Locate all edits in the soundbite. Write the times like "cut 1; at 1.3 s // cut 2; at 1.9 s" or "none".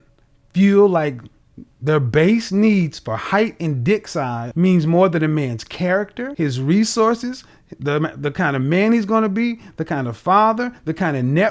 cut 1; at 4.4 s // cut 2; at 6.2 s

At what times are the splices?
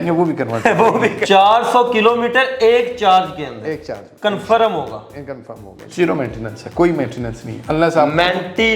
cut 1; at 1.2 s // cut 2; at 5.8 s

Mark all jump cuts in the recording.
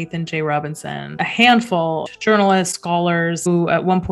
cut 1; at 1.2 s // cut 2; at 2.1 s // cut 3; at 3.5 s

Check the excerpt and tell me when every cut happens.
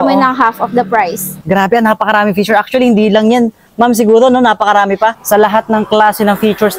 cut 1; at 1.4 s // cut 2; at 5.1 s

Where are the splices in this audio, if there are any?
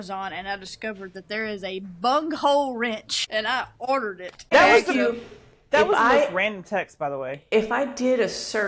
cut 1; at 3.3 s // cut 2; at 4.5 s

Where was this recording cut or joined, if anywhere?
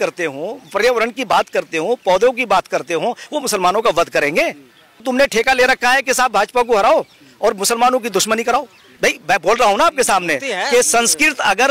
cut 1; at 5.0 s // cut 2; at 8.8 s

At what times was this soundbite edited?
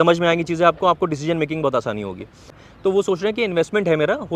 cut 1; at 2.6 s

